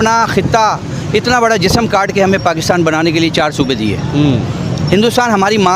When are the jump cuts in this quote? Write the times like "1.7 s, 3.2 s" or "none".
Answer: none